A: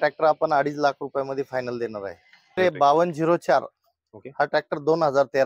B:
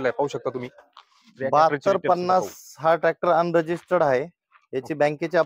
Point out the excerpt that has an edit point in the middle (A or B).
A